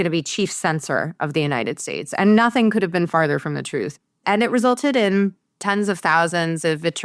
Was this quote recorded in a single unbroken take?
no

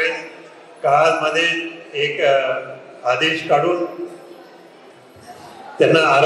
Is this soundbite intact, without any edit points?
yes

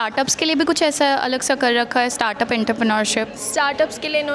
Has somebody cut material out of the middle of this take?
no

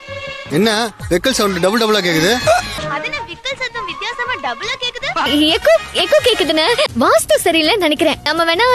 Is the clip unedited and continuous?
yes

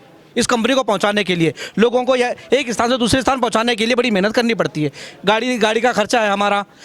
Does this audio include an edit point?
no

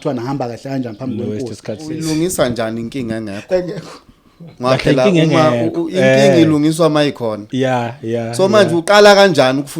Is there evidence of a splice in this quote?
yes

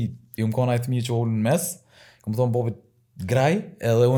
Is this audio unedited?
yes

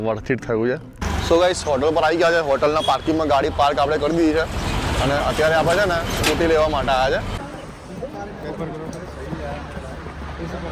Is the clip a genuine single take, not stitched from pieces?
no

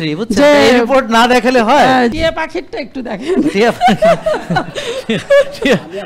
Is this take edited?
yes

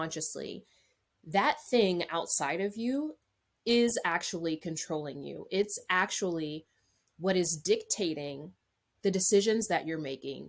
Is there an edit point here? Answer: no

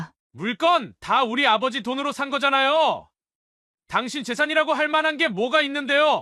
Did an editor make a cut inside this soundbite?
no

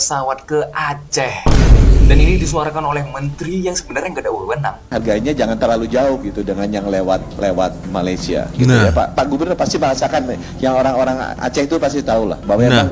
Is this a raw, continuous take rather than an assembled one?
no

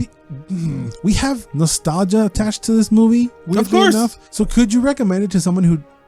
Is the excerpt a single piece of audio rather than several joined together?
no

